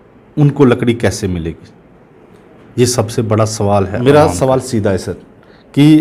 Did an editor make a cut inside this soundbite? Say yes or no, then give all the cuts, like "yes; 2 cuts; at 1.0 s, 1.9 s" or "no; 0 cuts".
yes; 1 cut; at 3.9 s